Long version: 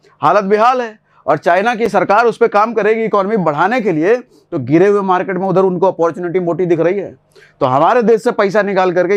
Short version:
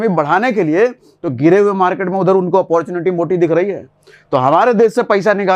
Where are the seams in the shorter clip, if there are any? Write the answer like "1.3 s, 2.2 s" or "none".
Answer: none